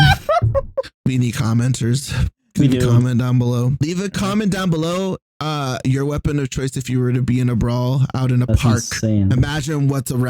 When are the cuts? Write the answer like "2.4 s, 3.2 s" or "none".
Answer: 3.8 s